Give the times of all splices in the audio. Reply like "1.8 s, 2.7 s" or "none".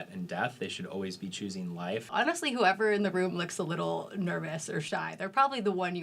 2.1 s